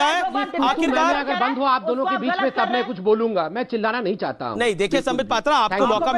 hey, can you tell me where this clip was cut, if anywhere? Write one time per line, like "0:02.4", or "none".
none